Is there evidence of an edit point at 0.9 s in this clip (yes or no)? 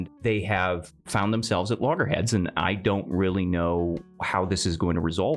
yes